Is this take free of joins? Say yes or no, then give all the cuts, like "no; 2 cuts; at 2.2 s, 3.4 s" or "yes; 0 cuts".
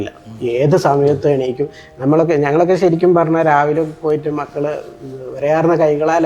yes; 0 cuts